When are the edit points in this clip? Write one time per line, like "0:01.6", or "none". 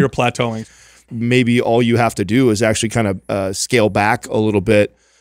0:00.9